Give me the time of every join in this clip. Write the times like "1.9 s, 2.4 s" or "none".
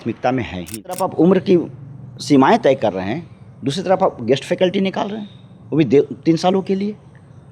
1.0 s